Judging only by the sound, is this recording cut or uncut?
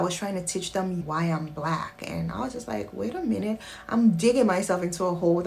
cut